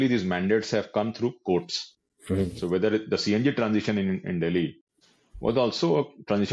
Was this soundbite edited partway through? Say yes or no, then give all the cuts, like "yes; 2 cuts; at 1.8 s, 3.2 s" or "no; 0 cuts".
no; 0 cuts